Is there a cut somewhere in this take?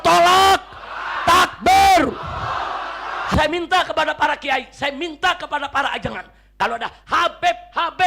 yes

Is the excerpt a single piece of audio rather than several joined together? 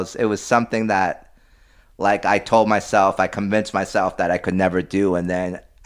yes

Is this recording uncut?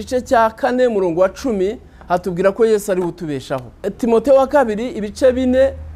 no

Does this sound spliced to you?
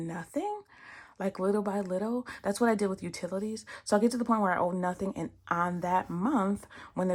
no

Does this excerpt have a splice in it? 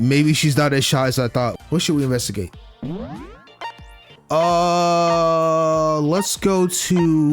yes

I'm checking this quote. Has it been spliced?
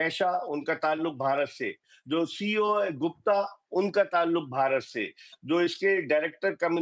no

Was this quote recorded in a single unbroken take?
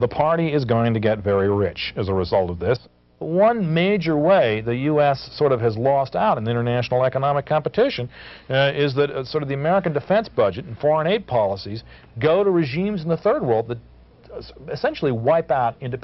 no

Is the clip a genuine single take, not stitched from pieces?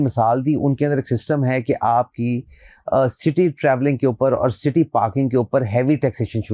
yes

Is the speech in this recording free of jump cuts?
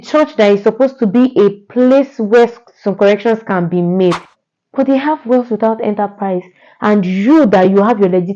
no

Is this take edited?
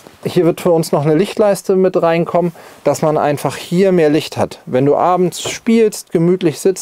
no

